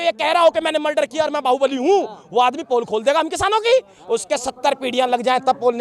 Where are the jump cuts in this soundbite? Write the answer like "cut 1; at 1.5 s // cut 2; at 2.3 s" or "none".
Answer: none